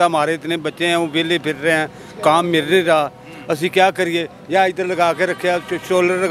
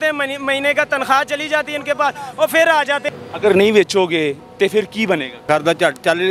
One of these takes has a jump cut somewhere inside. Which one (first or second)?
second